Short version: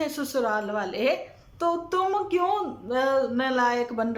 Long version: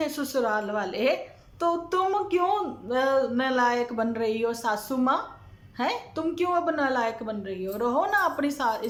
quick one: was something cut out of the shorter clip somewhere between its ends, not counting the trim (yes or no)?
no